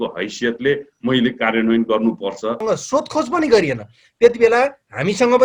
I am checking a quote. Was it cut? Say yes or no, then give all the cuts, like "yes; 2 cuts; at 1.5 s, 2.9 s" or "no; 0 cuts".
yes; 1 cut; at 2.6 s